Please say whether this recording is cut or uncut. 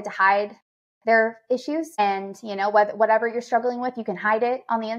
cut